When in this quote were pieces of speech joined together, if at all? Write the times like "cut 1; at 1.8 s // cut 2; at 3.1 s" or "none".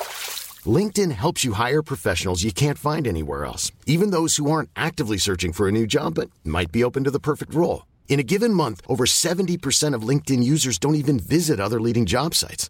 none